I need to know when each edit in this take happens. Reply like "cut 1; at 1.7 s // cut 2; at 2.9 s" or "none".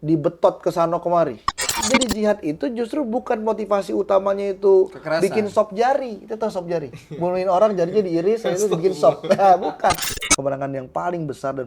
cut 1; at 1.8 s // cut 2; at 10.1 s